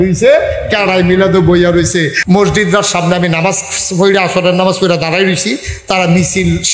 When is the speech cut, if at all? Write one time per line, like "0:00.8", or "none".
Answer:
0:02.1

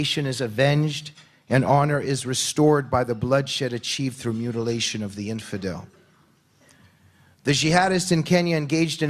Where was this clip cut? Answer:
none

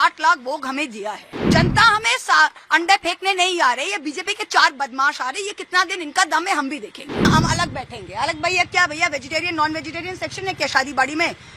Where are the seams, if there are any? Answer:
0:01.5
0:07.3

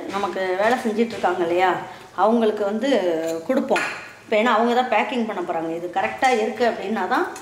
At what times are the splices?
none

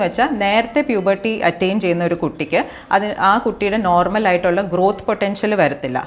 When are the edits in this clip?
none

